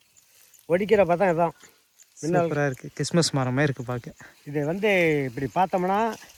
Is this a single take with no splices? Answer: yes; 0 cuts

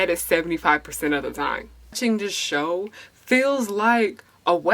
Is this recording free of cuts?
no; 1 cut; at 1.7 s

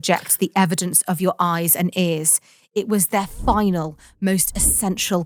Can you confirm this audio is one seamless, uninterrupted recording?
yes; 0 cuts

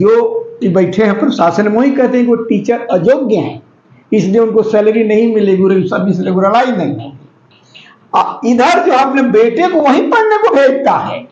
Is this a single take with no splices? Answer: yes; 0 cuts

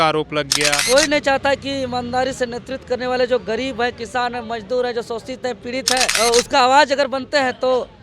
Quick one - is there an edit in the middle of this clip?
yes; 2 cuts; at 0.8 s, 6.1 s

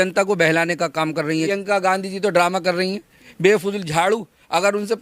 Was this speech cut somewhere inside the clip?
yes; 1 cut; at 1.5 s

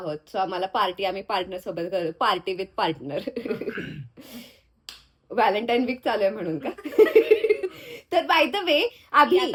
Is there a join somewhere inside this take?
no; 0 cuts

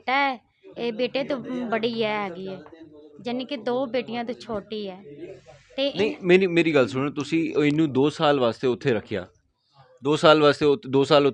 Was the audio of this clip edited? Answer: no; 0 cuts

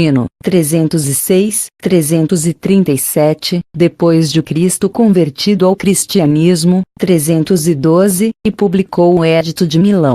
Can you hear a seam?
yes; 1 cut; at 8.5 s

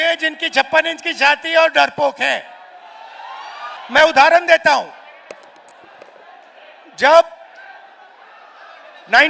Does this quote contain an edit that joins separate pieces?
yes; 1 cut; at 3.8 s

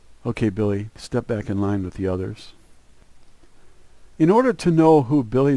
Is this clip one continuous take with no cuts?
yes; 0 cuts

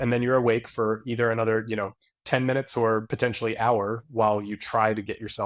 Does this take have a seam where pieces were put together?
no; 0 cuts

